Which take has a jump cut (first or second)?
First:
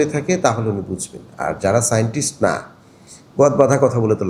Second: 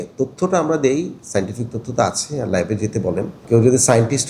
second